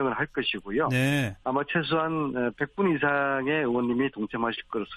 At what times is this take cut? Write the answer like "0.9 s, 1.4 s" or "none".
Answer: none